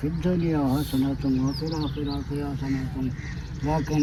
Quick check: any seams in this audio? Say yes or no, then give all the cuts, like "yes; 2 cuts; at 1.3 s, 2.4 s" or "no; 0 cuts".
no; 0 cuts